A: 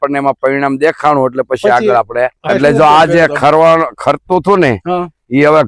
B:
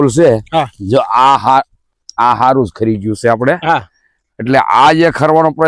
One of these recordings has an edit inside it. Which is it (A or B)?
A